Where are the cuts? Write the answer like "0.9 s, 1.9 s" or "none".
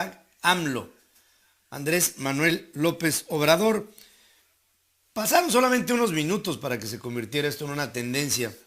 3.8 s